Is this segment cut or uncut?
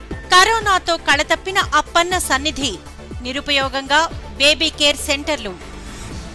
uncut